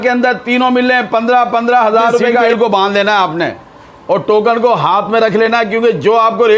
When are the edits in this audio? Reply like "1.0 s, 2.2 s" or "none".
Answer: 2.5 s